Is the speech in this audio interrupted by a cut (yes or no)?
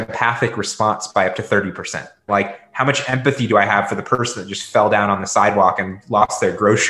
no